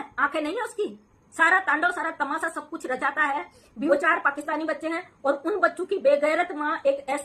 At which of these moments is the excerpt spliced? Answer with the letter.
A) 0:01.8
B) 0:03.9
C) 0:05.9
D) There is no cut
B